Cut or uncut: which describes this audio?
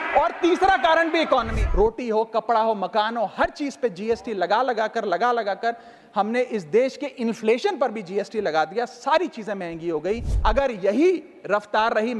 cut